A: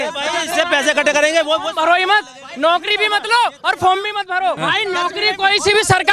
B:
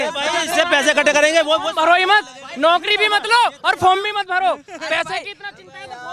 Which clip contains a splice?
A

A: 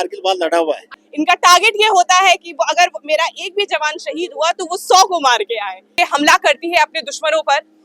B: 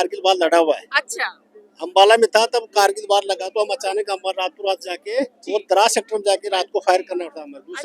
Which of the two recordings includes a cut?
A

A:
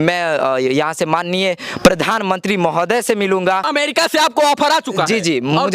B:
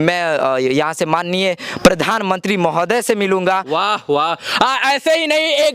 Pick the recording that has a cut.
A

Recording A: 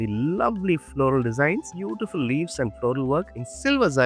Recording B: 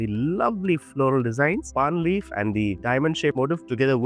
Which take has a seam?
B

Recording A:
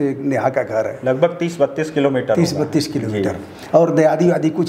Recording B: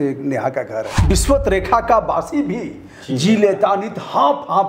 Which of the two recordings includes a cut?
B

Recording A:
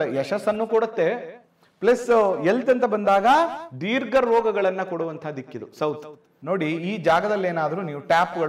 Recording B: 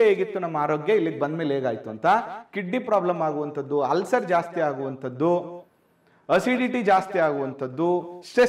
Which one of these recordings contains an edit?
A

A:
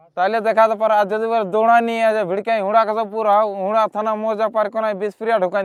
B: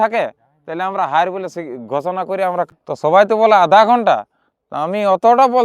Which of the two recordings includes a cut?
B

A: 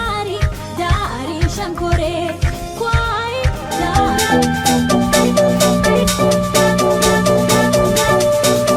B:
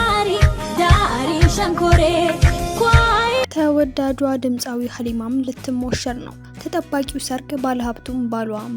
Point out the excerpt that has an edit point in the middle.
B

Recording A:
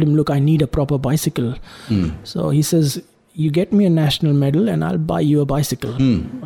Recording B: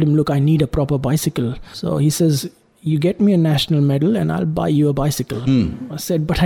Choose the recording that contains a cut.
B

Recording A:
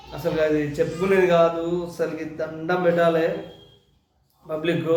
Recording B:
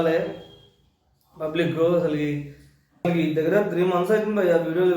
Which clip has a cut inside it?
B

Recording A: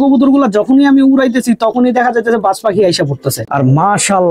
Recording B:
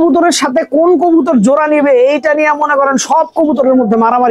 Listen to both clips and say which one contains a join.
A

